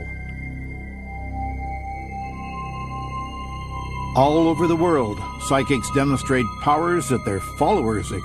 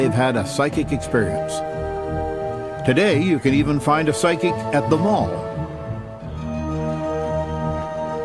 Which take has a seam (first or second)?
second